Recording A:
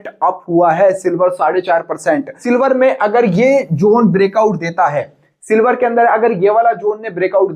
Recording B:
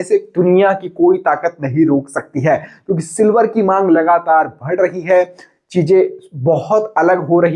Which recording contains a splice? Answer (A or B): A